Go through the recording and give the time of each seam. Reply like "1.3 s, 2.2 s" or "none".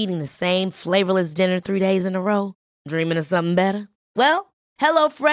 none